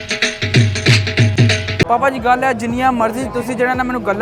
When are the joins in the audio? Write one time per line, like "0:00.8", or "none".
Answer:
none